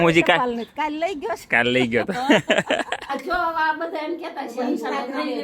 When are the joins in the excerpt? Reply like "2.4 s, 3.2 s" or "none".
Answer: 3.0 s